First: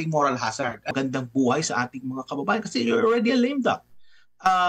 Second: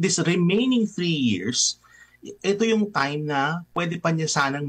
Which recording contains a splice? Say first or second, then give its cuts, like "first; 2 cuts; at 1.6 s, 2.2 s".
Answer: first; 1 cut; at 0.9 s